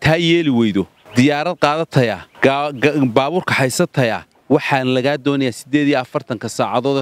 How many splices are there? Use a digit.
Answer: 3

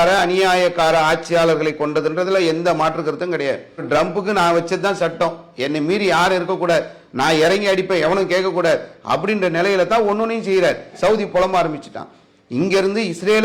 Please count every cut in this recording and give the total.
2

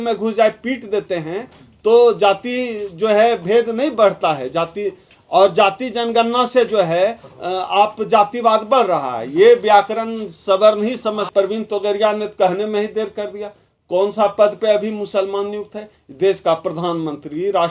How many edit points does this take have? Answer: 1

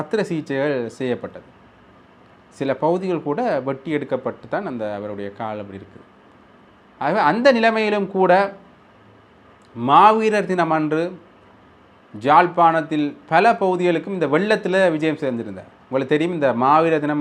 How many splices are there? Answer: 0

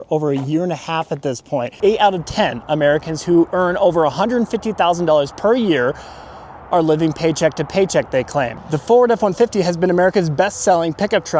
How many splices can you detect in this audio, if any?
2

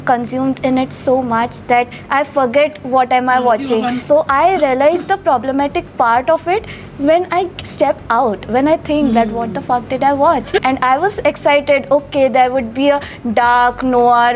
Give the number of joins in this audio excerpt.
2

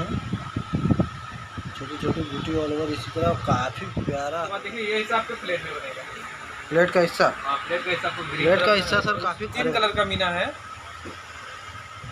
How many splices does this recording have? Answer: 2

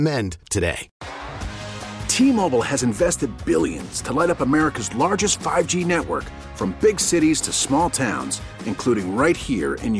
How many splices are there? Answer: 1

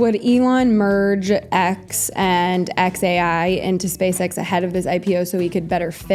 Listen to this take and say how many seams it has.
0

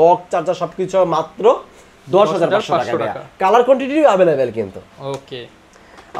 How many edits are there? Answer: 0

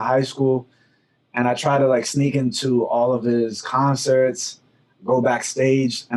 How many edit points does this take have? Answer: 0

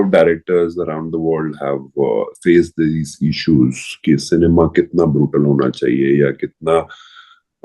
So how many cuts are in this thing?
0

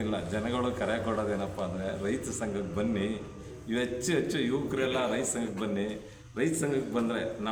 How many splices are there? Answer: 0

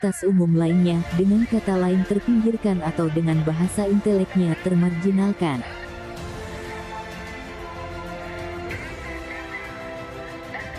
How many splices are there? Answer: 0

